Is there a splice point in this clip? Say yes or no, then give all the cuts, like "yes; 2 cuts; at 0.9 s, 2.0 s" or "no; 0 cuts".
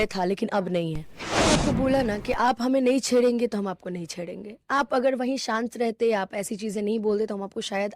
yes; 1 cut; at 1.5 s